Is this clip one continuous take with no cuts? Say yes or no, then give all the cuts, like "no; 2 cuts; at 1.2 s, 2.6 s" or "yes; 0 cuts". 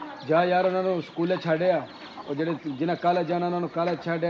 yes; 0 cuts